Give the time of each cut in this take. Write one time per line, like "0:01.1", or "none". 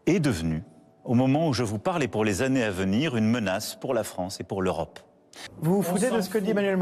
0:05.4